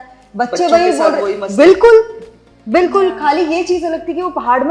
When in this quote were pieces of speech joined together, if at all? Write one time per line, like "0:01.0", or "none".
none